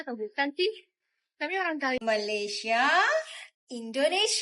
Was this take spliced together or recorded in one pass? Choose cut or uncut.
cut